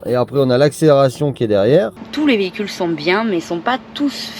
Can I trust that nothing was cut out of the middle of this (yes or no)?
no